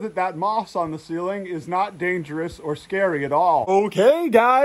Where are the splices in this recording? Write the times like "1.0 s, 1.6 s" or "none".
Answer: none